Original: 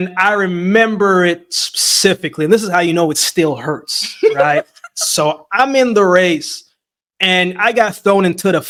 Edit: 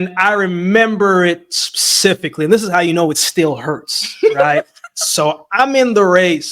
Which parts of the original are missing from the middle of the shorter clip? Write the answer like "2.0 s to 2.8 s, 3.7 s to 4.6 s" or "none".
none